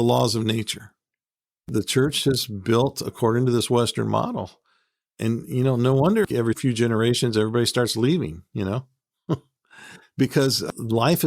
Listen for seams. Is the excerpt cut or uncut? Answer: cut